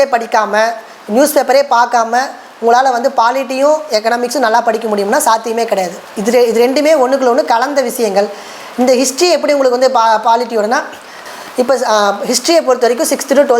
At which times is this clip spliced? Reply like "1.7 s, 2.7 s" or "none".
11.2 s